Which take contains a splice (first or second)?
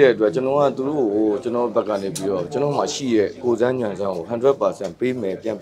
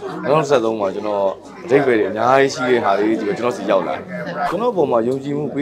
second